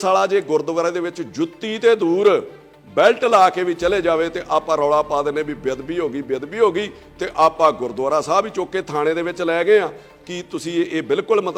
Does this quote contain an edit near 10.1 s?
no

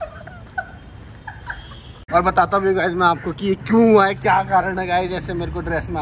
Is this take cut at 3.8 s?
no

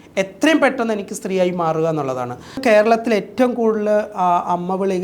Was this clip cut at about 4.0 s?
no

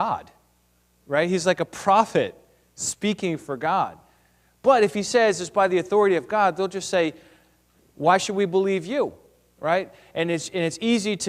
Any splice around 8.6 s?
no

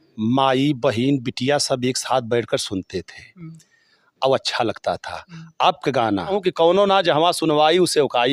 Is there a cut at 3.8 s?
no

